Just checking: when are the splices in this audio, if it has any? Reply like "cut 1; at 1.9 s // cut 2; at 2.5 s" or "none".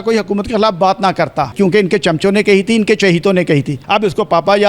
cut 1; at 1.5 s // cut 2; at 3.8 s